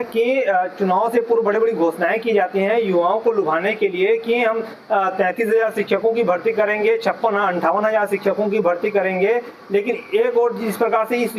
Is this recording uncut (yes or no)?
yes